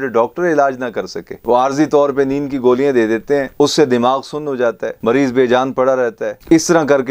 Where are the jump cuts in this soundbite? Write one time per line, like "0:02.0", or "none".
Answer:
none